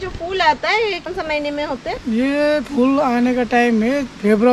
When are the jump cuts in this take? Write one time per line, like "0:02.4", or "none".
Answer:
0:01.1

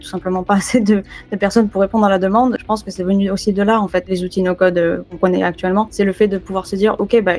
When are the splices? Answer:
0:02.6
0:04.1
0:05.2
0:05.9

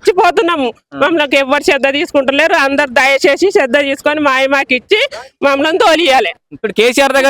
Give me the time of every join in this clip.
0:06.4

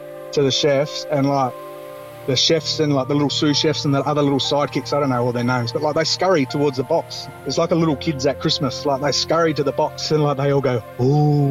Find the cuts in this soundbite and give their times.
0:10.0

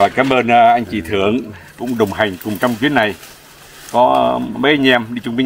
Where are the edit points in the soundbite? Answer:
none

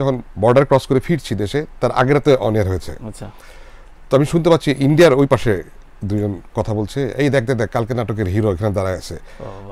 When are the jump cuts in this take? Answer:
none

